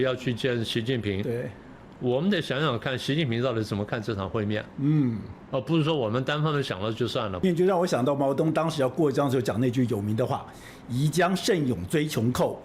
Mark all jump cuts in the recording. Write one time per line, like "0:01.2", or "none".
0:07.4

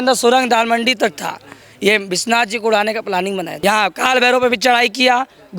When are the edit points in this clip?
0:03.5

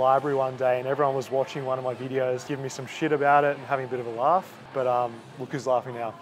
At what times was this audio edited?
0:02.4
0:04.6

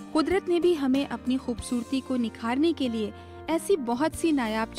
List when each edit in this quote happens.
none

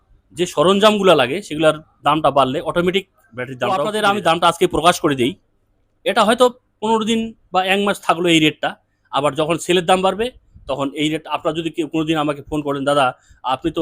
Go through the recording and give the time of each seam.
0:03.8

